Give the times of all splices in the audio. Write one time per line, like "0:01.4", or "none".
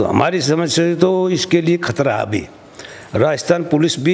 none